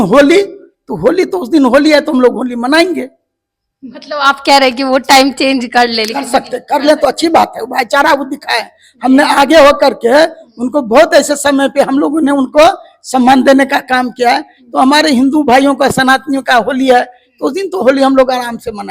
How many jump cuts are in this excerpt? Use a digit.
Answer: 0